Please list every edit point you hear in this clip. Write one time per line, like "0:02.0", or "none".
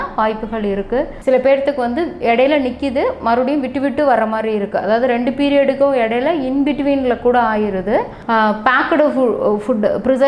0:01.1
0:08.2